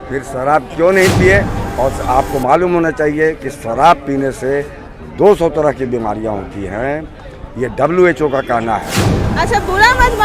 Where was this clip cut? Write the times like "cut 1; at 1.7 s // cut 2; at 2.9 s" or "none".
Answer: cut 1; at 1.6 s // cut 2; at 9.2 s